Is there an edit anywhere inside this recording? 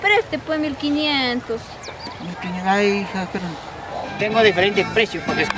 yes; 1 cut; at 4.1 s

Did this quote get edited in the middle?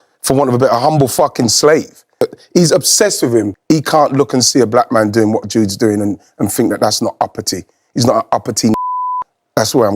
yes; 2 cuts; at 2.4 s, 3.5 s

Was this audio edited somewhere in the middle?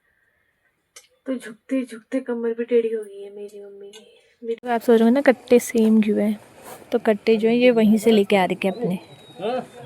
yes; 1 cut; at 4.6 s

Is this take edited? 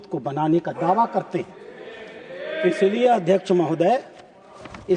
no; 0 cuts

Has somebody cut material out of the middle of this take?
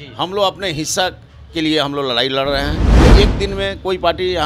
yes; 1 cut; at 3.0 s

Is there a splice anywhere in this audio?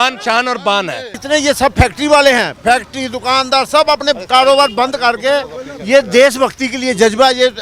yes; 1 cut; at 1.1 s

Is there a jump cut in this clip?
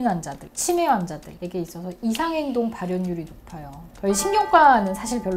yes; 1 cut; at 3.9 s

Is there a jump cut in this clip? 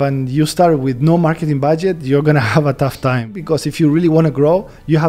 yes; 1 cut; at 3.4 s

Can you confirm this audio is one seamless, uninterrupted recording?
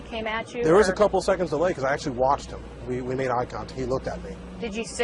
yes; 0 cuts

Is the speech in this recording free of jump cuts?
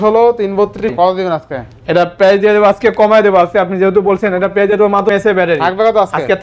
no; 2 cuts; at 0.9 s, 5.0 s

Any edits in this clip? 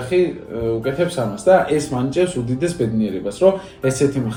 no; 0 cuts

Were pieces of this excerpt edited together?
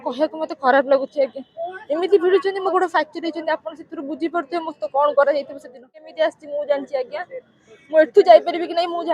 yes; 1 cut; at 6.1 s

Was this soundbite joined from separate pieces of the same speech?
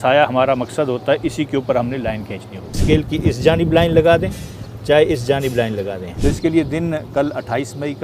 yes; 2 cuts; at 2.7 s, 6.0 s

